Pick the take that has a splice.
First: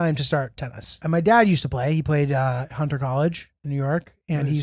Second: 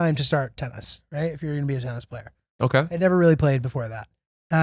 first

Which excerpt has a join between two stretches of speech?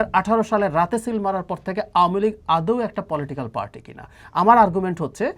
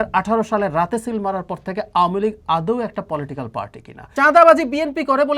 second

